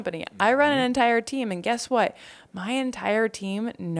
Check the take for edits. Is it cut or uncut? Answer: uncut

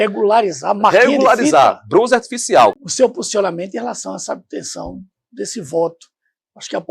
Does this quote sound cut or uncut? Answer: cut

